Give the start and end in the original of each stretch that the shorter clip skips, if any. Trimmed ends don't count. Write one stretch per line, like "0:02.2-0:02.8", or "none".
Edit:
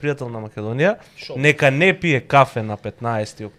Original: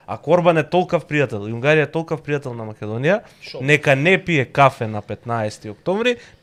none

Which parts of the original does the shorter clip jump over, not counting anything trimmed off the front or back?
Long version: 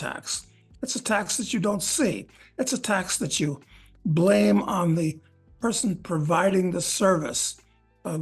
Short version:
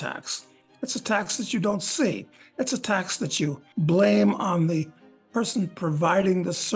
0:03.6-0:03.9

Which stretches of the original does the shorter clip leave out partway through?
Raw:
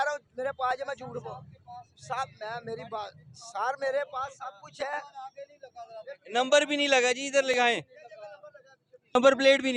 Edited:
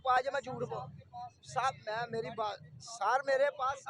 none

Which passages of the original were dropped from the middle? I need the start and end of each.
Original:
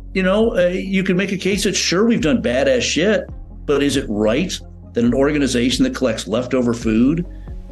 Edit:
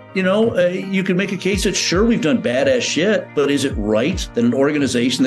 0:03.3-0:03.6
0:04.5-0:04.8

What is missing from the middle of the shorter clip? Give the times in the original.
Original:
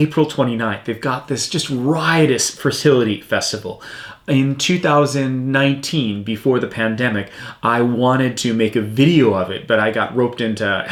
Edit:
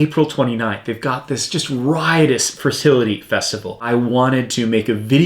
0:03.8-0:07.7

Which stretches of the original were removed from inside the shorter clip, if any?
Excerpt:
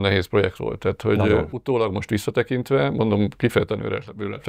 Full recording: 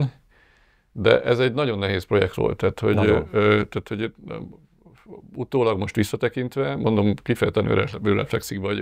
0:03.3-0:05.3

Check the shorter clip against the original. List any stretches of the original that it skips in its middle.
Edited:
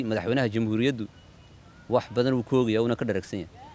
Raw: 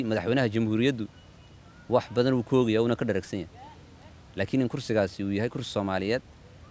none

